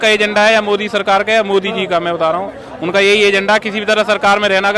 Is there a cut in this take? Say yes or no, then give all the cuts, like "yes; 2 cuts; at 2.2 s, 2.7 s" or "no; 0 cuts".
no; 0 cuts